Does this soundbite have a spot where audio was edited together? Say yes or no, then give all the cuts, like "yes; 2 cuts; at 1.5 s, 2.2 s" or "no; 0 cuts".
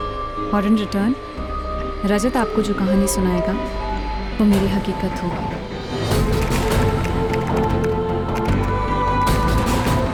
no; 0 cuts